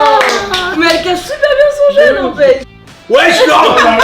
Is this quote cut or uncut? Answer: cut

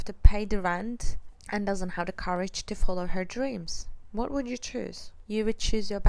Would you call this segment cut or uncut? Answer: cut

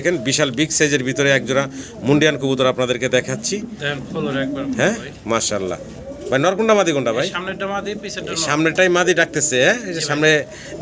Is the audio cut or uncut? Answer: uncut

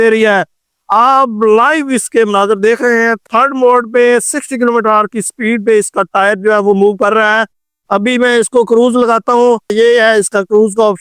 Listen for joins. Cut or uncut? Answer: cut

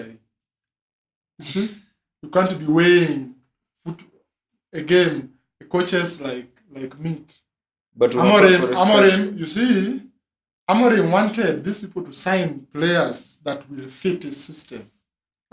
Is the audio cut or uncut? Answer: uncut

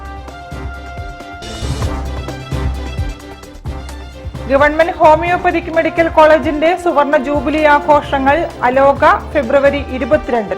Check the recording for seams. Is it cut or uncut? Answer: cut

